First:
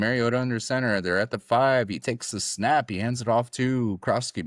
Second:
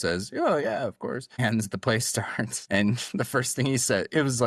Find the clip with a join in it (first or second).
second